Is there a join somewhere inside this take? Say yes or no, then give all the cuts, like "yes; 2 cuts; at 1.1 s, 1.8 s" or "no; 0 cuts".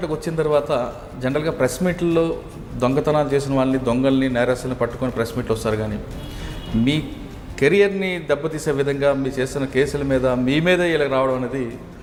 no; 0 cuts